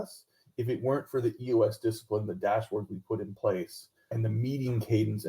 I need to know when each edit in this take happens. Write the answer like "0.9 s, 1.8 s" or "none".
4.2 s